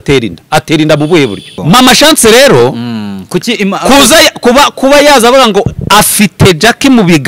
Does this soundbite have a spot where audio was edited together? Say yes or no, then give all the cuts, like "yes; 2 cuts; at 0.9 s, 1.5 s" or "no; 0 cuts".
yes; 1 cut; at 1.5 s